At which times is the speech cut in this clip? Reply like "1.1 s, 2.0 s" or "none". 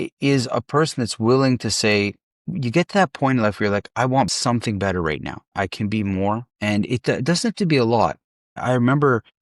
5.4 s